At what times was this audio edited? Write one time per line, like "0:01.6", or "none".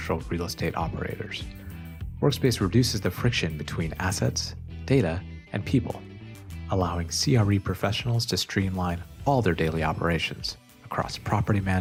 none